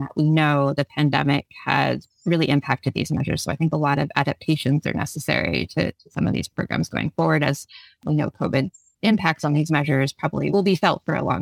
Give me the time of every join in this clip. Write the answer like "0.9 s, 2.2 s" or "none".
8.0 s, 10.5 s